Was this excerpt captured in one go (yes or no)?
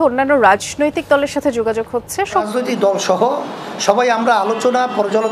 no